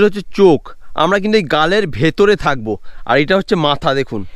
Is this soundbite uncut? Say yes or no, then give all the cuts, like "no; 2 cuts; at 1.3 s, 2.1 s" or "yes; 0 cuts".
yes; 0 cuts